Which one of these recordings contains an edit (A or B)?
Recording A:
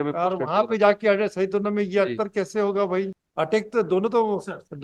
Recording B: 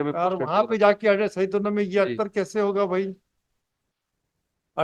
A